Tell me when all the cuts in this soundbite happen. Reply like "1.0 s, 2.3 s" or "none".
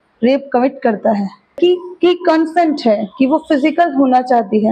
1.6 s